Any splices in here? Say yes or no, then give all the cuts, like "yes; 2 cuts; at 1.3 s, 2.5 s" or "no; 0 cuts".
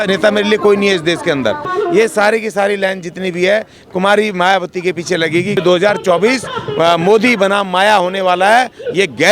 yes; 2 cuts; at 1.6 s, 5.6 s